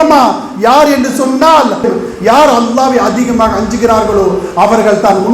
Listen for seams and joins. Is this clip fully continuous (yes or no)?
no